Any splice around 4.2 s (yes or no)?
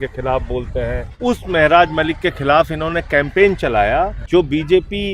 yes